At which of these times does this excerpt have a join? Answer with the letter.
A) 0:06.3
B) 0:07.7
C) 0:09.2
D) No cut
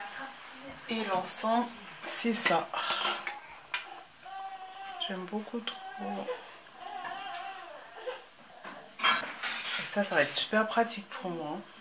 C